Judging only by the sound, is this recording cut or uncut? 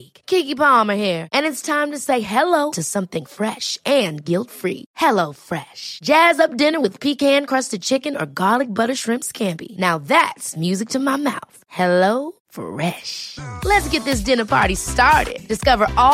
uncut